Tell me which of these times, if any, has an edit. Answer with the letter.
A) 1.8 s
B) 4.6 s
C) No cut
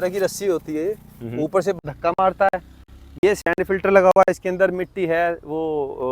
A